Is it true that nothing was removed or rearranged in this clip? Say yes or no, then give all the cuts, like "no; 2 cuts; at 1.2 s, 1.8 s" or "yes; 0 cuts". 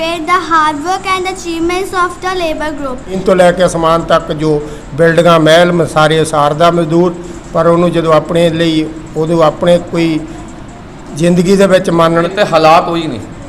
no; 2 cuts; at 3.2 s, 12.3 s